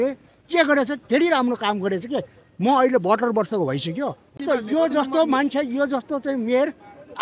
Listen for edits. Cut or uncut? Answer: cut